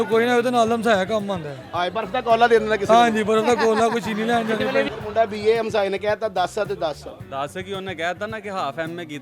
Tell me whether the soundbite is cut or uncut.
cut